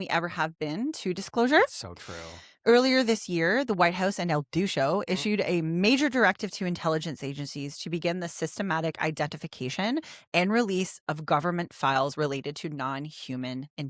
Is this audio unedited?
yes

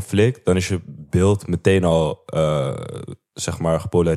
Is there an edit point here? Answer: no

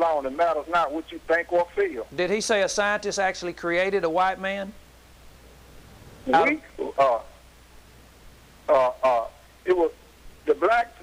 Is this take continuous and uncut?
yes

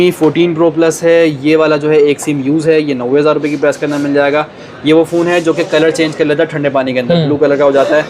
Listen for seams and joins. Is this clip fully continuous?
yes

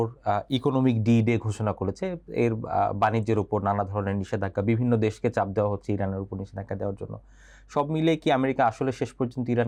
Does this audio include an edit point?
no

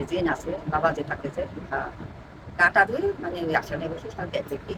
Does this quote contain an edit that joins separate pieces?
no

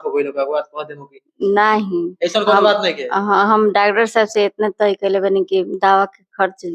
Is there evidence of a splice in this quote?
no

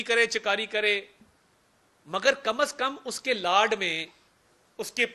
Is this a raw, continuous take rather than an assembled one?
yes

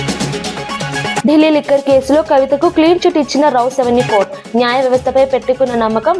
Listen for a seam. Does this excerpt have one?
no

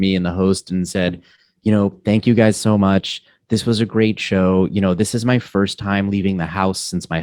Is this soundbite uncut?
yes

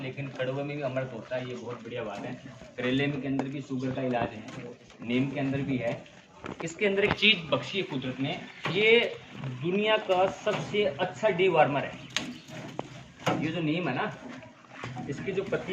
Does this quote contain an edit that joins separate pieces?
no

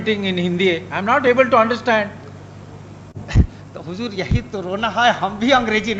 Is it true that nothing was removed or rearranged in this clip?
yes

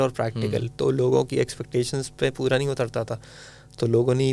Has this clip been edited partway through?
no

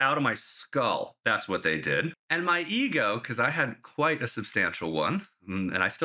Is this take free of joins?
yes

